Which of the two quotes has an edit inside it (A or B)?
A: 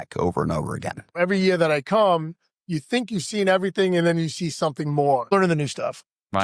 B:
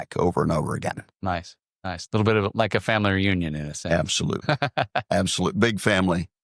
A